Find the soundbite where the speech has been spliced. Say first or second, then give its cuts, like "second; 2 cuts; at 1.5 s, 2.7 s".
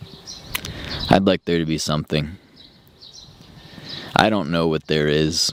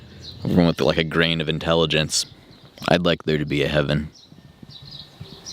second; 1 cut; at 2.2 s